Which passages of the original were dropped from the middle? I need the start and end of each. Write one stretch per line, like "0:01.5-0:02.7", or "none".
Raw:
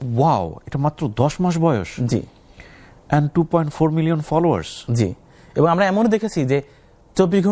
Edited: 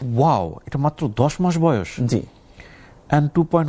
none